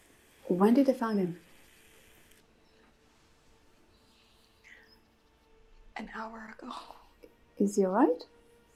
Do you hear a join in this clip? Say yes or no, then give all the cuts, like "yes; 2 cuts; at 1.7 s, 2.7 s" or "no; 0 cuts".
no; 0 cuts